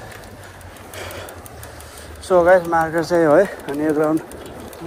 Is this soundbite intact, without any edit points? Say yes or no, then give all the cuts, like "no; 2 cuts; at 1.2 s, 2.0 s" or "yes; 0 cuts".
yes; 0 cuts